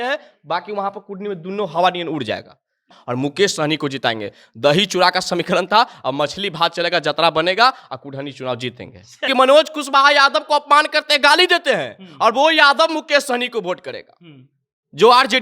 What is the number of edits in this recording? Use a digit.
2